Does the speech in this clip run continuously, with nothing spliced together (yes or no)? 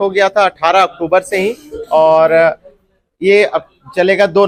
yes